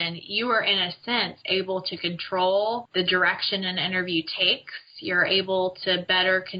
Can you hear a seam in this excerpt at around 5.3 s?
no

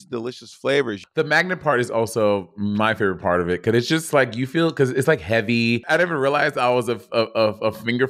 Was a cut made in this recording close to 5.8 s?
yes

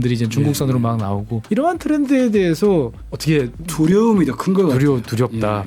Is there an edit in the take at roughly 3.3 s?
yes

